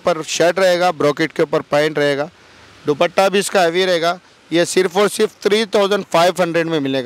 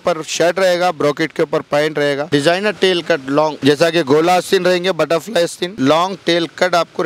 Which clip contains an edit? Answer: second; 3 cuts; at 2.2 s, 3.6 s, 5.6 s

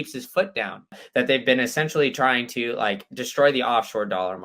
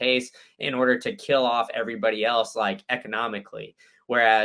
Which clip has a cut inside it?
first; 1 cut; at 1.0 s

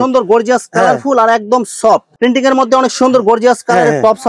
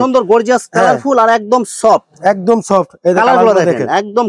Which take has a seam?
first; 1 cut; at 2.1 s

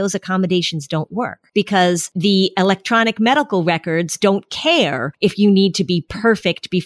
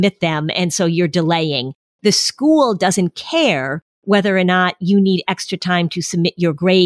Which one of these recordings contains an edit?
first; 3 cuts; at 1.4 s, 2.1 s, 5.1 s

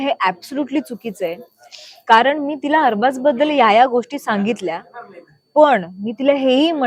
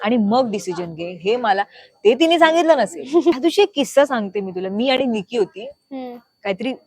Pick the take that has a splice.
second; 1 cut; at 3.4 s

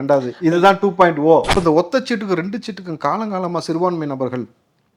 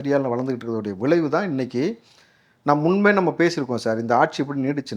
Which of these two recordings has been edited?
first; 1 cut; at 1.5 s

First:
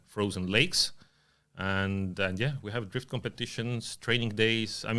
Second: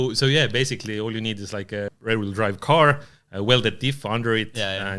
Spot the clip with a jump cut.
second; 1 cut; at 1.9 s

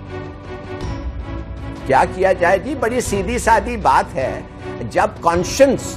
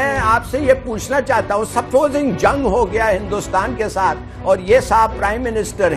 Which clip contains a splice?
second; 1 cut; at 4.4 s

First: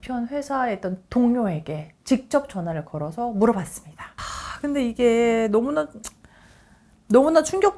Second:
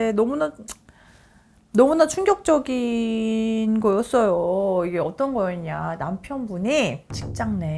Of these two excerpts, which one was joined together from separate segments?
first; 1 cut; at 4.1 s

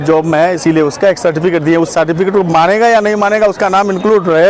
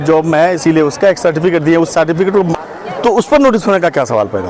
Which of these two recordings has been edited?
second; 1 cut; at 2.5 s

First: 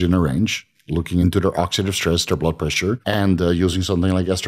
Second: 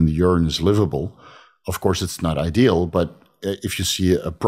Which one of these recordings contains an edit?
first; 2 cuts; at 1.2 s, 3.0 s

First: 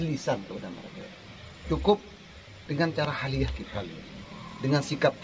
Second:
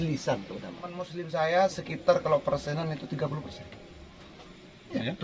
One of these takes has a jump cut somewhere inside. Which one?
second; 1 cut; at 1.1 s

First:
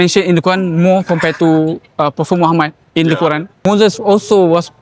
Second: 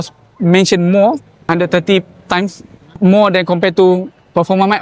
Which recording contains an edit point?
first; 1 cut; at 3.6 s

